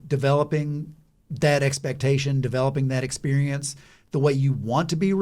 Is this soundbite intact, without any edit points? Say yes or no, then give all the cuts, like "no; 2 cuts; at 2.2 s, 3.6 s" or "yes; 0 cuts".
yes; 0 cuts